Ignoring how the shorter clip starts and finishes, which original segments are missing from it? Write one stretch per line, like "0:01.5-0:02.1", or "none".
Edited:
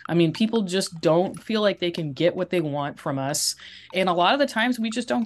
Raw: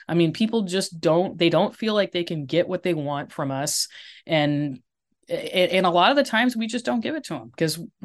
0:01.4-0:01.7
0:04.3-0:05.7